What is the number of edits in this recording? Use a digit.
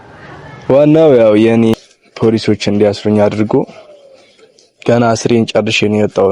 1